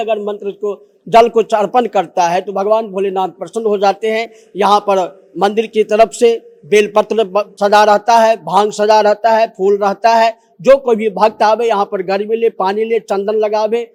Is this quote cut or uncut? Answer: uncut